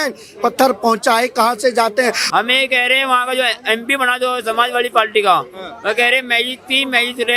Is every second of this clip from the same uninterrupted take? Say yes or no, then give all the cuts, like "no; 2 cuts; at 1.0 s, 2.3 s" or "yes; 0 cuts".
no; 1 cut; at 2.2 s